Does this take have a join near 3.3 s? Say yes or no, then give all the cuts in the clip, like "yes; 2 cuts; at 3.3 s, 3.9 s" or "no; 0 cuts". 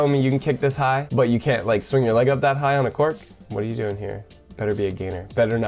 no; 1 cut; at 1.1 s